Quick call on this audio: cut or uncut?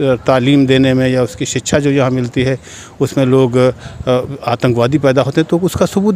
uncut